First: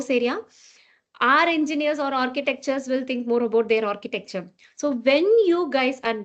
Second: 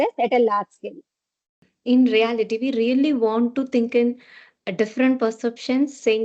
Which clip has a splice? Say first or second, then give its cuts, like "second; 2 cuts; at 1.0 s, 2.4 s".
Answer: second; 1 cut; at 1.5 s